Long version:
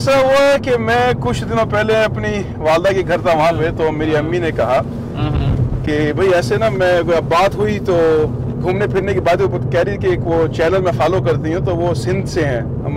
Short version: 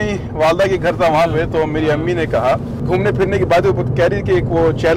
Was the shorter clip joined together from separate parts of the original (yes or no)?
yes